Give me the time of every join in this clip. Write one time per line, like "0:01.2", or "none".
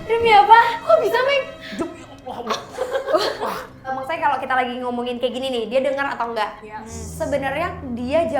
0:03.9